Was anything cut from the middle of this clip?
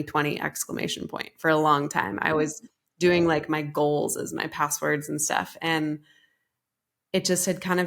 no; 0 cuts

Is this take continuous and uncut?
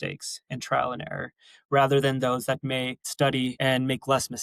no; 1 cut; at 3.4 s

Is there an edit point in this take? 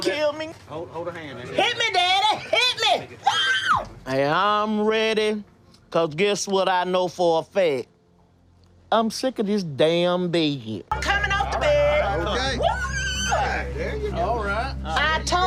no; 0 cuts

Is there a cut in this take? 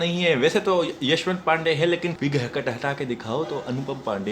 yes; 1 cut; at 2.2 s

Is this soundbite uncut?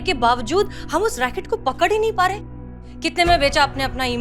no; 1 cut; at 2.6 s

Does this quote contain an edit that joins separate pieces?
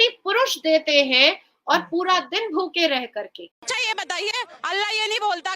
yes; 1 cut; at 3.8 s

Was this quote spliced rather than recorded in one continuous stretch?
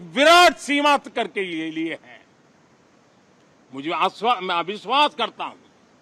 no; 0 cuts

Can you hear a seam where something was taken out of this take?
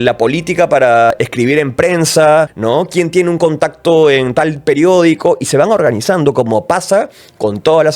yes; 2 cuts; at 1.1 s, 2.5 s

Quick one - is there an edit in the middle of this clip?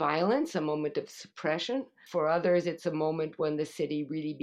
yes; 1 cut; at 2.0 s

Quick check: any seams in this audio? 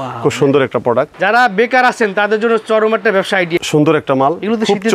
yes; 2 cuts; at 1.2 s, 3.6 s

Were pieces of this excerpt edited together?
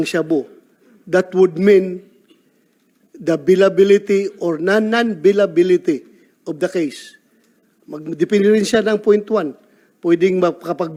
no; 0 cuts

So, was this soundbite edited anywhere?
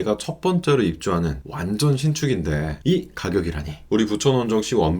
yes; 1 cut; at 3.8 s

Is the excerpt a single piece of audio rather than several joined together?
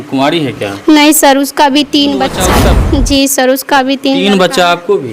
no; 1 cut; at 2.6 s

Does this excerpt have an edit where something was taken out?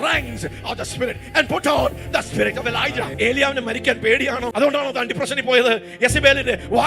yes; 2 cuts; at 3.1 s, 4.5 s

